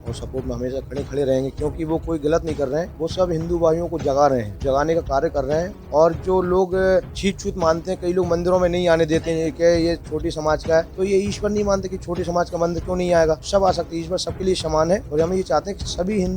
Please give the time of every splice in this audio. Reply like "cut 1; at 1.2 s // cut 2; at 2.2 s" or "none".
cut 1; at 2.9 s // cut 2; at 4.5 s // cut 3; at 7.1 s // cut 4; at 10.9 s // cut 5; at 13.4 s // cut 6; at 15.1 s